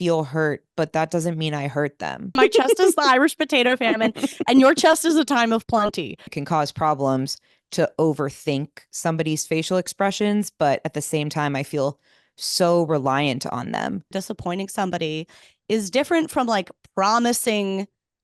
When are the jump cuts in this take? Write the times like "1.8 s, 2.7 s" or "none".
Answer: 2.4 s, 6.3 s, 14.2 s